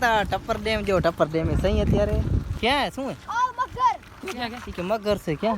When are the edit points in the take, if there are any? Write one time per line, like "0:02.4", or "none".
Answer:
0:02.4